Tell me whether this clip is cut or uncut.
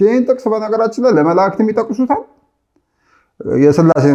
uncut